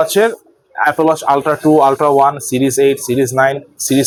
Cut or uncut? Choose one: uncut